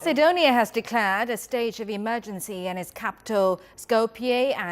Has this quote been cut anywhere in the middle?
yes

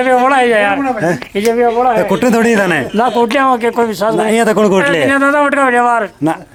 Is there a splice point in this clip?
no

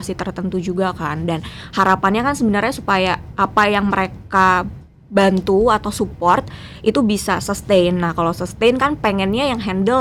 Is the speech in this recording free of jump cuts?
yes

